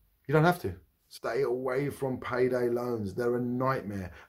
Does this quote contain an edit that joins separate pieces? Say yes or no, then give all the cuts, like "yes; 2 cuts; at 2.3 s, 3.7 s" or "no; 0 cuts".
yes; 1 cut; at 1.0 s